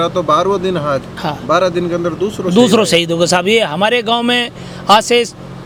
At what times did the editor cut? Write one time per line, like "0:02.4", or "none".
none